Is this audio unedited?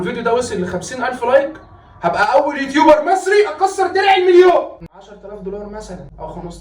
no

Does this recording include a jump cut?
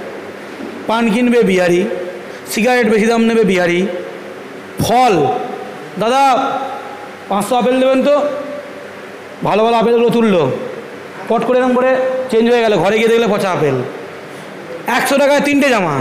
no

